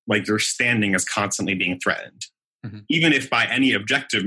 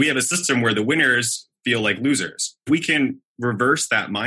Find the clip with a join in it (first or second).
second